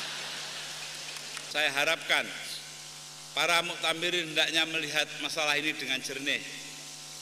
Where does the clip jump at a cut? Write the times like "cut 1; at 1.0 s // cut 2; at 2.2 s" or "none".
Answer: cut 1; at 1.3 s

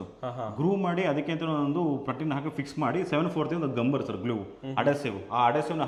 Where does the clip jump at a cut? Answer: none

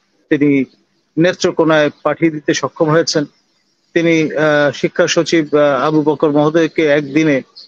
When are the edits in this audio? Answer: none

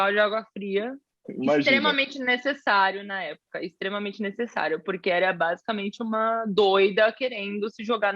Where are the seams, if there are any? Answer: cut 1; at 1.2 s

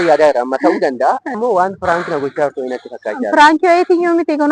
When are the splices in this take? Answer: cut 1; at 1.4 s

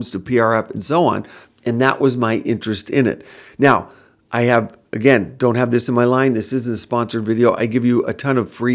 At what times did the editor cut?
none

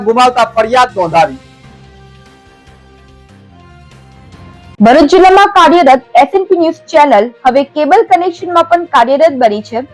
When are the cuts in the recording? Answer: cut 1; at 4.7 s

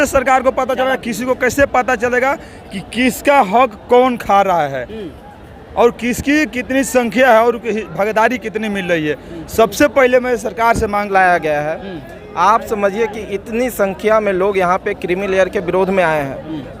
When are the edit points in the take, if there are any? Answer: cut 1; at 11.1 s

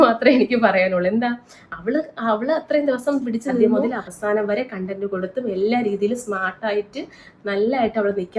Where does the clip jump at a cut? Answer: cut 1; at 3.7 s

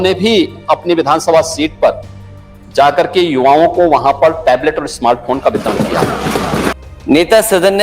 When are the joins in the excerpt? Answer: cut 1; at 6.7 s

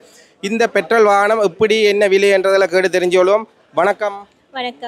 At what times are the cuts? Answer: none

